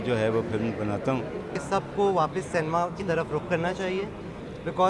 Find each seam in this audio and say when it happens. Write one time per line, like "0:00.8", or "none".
0:01.6